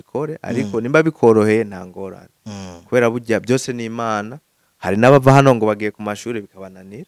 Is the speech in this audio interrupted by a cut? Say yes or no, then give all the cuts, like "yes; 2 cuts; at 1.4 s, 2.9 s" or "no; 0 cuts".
no; 0 cuts